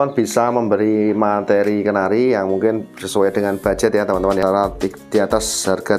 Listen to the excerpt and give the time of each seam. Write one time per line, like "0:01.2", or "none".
0:04.4